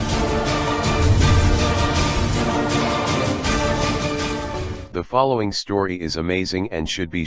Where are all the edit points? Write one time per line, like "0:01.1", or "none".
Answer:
none